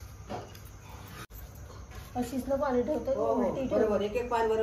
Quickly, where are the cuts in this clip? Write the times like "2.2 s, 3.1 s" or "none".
1.4 s